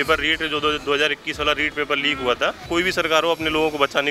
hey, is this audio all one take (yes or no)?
no